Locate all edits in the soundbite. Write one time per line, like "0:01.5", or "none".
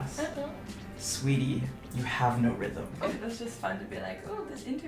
0:03.0